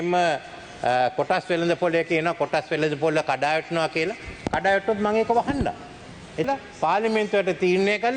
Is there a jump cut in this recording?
yes; 1 cut; at 6.5 s

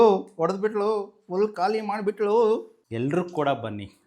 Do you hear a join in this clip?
yes; 1 cut; at 2.7 s

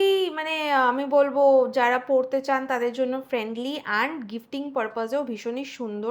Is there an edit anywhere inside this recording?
no; 0 cuts

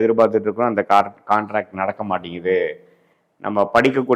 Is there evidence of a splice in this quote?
no; 0 cuts

